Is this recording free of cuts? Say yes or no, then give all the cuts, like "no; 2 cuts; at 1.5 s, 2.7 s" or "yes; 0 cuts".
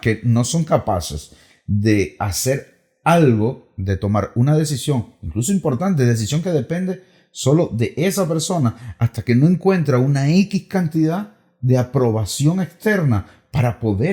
yes; 0 cuts